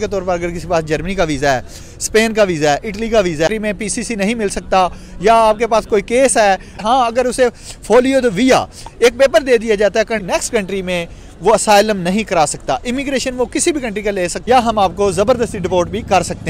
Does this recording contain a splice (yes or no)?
yes